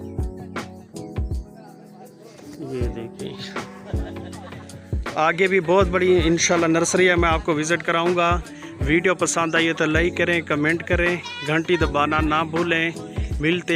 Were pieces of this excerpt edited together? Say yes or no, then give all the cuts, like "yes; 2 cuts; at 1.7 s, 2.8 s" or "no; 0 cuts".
no; 0 cuts